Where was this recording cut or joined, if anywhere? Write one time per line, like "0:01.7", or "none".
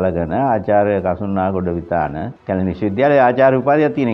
0:02.3